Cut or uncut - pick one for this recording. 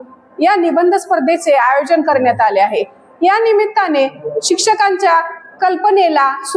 uncut